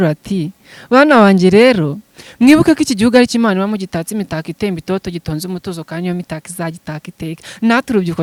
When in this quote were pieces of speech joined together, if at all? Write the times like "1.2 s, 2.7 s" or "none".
none